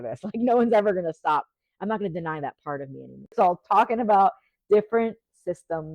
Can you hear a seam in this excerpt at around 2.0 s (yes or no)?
no